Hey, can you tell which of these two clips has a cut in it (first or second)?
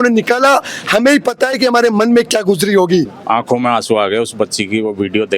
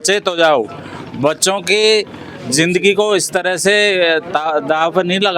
first